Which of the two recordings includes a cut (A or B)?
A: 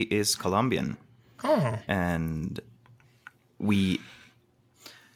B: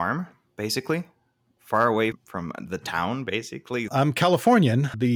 B